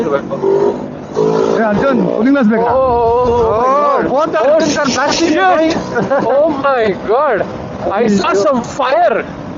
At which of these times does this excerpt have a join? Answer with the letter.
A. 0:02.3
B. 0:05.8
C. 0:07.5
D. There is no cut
D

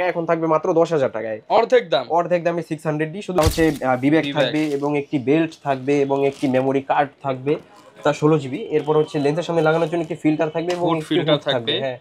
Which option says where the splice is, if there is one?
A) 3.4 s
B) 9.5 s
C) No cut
A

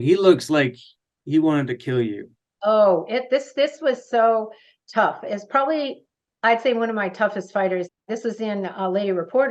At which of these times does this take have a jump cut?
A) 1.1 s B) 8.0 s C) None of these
B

